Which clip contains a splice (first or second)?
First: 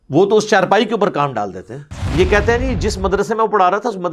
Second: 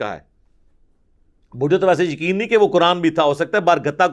first